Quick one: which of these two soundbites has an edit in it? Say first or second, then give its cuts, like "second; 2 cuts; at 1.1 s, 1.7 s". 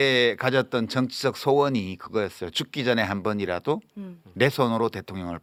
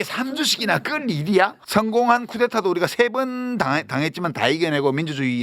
second; 1 cut; at 1.6 s